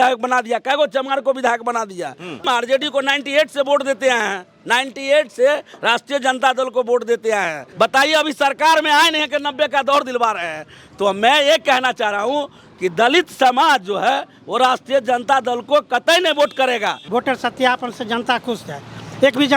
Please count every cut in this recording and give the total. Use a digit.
3